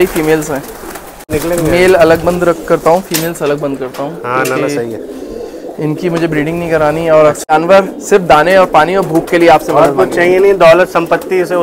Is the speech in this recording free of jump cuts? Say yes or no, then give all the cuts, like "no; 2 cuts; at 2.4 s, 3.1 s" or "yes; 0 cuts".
no; 2 cuts; at 1.3 s, 7.4 s